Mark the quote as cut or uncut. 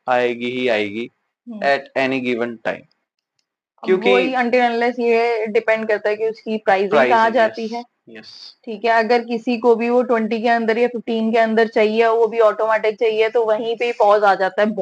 uncut